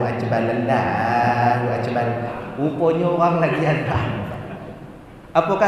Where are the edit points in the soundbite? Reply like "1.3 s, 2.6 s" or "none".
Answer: 2.4 s